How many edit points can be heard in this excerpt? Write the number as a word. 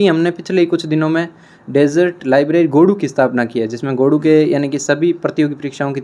zero